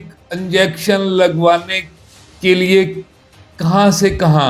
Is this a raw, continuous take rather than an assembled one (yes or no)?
yes